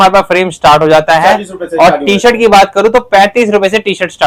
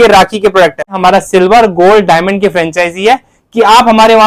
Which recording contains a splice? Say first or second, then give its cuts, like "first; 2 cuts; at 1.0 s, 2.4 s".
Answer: second; 1 cut; at 0.9 s